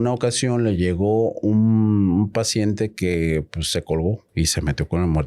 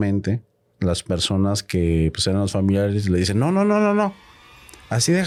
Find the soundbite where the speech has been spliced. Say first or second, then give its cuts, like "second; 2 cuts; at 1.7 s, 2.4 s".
first; 1 cut; at 4.2 s